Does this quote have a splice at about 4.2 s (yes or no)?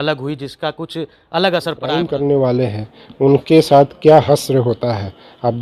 yes